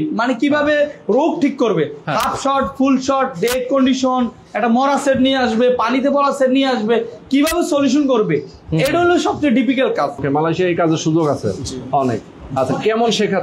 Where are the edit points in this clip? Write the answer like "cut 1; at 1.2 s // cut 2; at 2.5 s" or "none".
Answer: cut 1; at 10.2 s

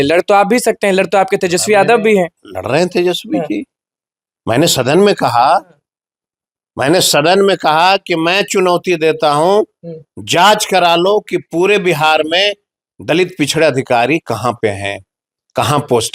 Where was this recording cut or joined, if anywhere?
none

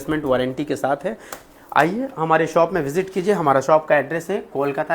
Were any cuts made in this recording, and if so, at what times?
none

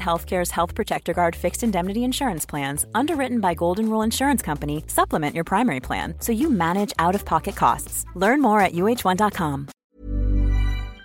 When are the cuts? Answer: cut 1; at 9.7 s

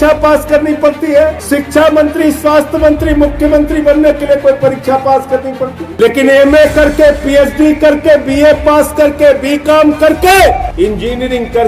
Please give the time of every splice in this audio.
cut 1; at 1.4 s // cut 2; at 5.8 s // cut 3; at 10.7 s

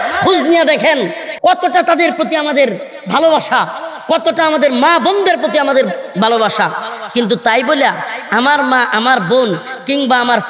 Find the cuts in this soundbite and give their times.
cut 1; at 1.2 s

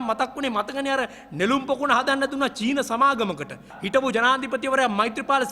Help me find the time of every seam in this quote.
cut 1; at 3.7 s

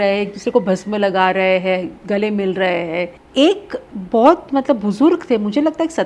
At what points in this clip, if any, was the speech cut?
cut 1; at 3.2 s

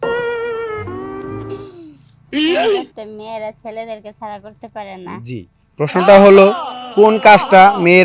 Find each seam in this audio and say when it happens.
cut 1; at 2.9 s

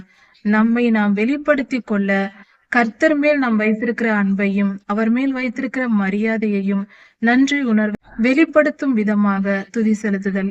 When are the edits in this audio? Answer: cut 1; at 7.9 s

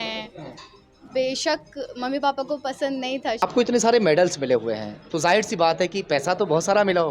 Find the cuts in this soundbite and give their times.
cut 1; at 3.4 s

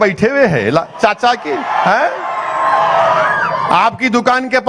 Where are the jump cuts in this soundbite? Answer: none

